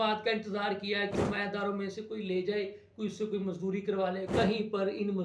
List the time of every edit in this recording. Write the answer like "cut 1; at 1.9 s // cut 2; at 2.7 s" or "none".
cut 1; at 1.1 s // cut 2; at 4.3 s